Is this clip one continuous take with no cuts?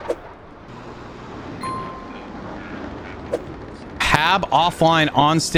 yes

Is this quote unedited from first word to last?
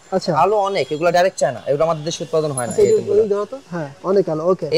yes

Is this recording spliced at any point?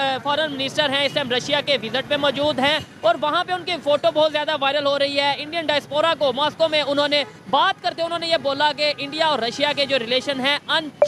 no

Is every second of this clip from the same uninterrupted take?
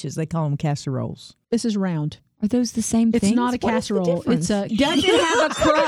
no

